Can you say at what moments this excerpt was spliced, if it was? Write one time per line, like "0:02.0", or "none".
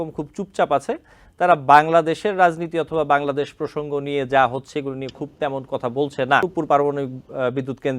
0:06.5

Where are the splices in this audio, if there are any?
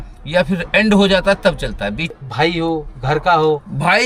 0:02.1

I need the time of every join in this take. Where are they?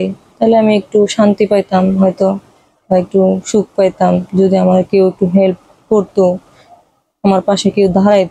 none

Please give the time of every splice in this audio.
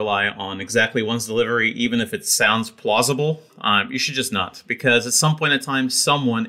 none

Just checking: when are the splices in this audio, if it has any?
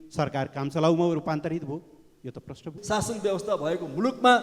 0:02.7

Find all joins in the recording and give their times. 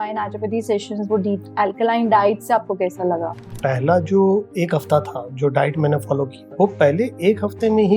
0:03.5
0:06.4

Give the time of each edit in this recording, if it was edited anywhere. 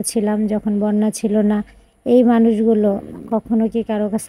none

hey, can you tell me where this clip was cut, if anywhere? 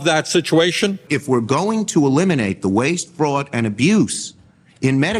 0:00.9

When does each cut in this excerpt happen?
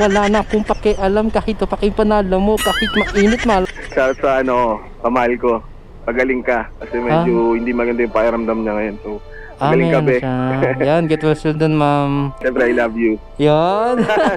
0:03.6
0:12.4

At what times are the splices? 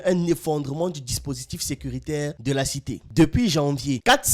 0:03.1

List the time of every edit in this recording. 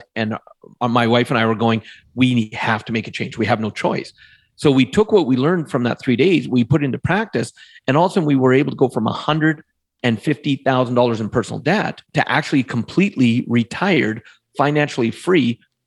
0:12.0

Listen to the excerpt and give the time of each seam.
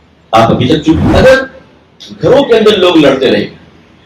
0:01.1

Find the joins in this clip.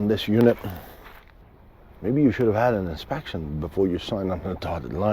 0:01.3

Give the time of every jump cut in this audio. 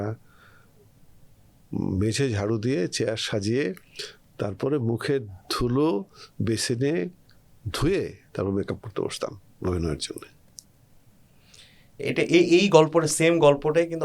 none

